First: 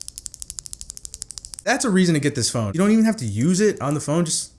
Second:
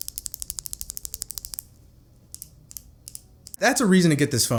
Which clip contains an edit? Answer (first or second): first